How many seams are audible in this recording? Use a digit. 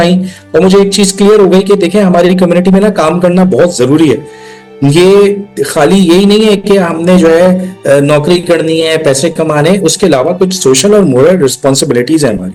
0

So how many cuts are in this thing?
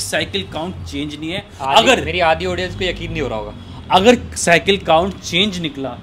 0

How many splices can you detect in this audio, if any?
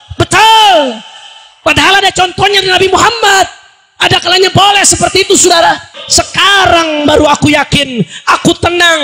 1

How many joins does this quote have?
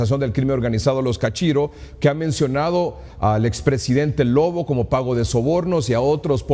1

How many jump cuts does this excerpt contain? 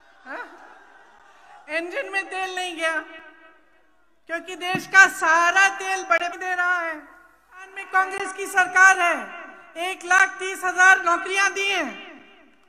1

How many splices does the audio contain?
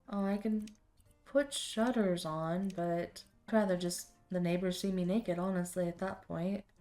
1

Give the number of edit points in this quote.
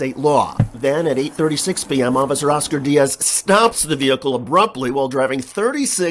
1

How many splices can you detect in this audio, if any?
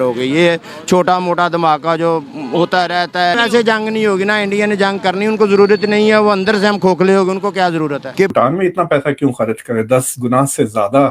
2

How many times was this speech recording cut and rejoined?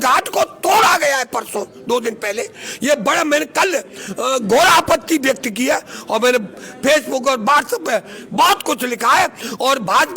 0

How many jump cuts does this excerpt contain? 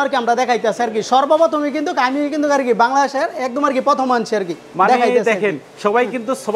0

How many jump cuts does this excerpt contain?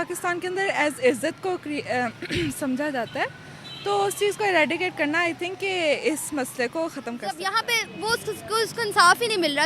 1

